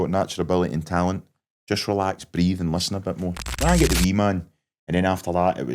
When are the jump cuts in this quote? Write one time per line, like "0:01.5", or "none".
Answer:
0:03.6